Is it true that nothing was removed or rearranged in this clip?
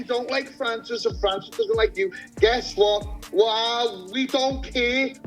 no; 1 cut; at 2.7 s

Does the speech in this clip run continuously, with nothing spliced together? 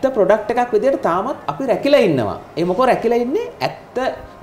yes; 0 cuts

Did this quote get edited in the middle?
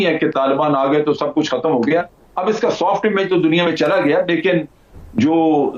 no; 0 cuts

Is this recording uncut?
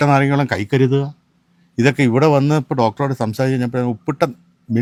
yes; 0 cuts

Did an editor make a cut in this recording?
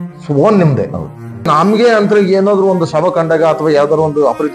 yes; 1 cut; at 1.5 s

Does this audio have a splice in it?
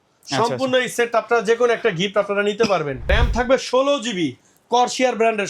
yes; 1 cut; at 3.0 s

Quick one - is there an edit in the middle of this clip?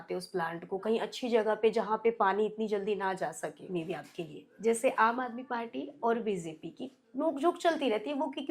yes; 1 cut; at 3.6 s

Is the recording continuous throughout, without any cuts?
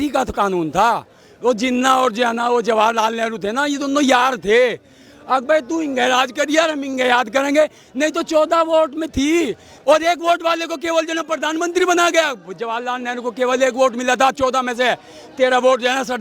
no; 1 cut; at 9.7 s

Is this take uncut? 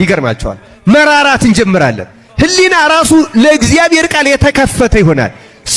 yes; 0 cuts

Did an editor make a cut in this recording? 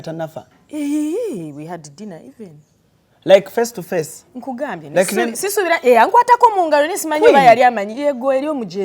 no; 0 cuts

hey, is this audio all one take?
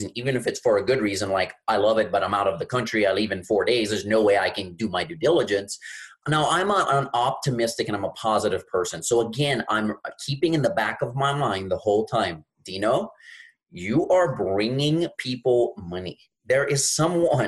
no; 1 cut; at 6.2 s

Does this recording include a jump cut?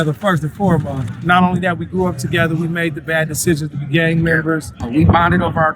yes; 2 cuts; at 1.1 s, 4.9 s

